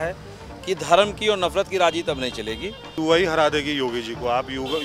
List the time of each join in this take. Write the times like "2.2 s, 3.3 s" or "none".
2.9 s